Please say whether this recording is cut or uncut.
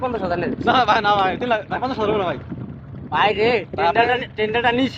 uncut